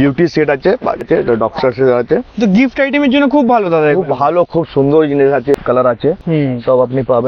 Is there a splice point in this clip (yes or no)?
yes